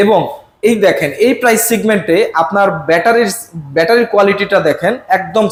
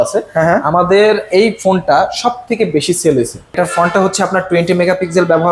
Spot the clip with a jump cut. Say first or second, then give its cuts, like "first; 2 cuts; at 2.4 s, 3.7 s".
second; 1 cut; at 3.6 s